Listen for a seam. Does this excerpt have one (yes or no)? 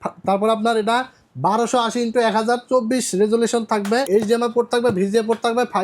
yes